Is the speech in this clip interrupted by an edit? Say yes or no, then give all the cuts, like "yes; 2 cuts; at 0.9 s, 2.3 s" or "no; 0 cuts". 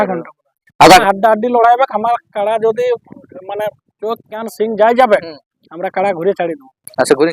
yes; 1 cut; at 1.0 s